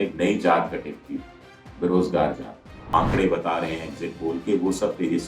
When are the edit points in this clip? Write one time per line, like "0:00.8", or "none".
0:02.8